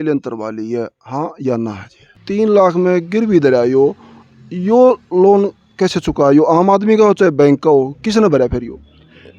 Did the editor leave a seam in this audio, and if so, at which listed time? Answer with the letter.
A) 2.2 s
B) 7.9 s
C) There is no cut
A